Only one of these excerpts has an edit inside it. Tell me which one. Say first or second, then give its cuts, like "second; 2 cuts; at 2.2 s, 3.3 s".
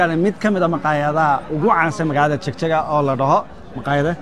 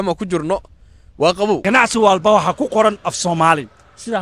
second; 1 cut; at 1.6 s